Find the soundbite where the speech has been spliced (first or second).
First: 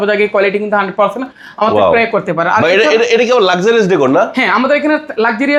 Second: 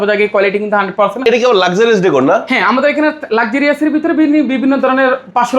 second